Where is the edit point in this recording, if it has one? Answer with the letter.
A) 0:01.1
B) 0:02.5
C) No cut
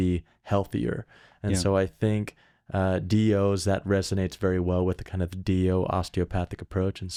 C